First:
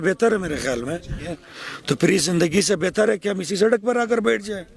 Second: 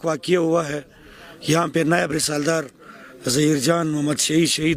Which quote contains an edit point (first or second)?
first